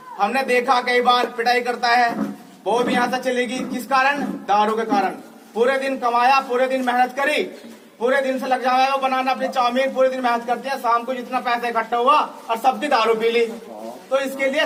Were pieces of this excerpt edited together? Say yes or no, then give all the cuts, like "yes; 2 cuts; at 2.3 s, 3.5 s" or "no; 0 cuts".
no; 0 cuts